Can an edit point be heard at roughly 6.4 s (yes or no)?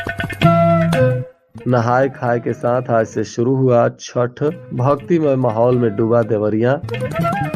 no